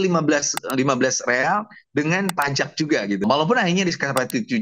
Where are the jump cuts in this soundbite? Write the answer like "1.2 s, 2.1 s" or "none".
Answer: 3.2 s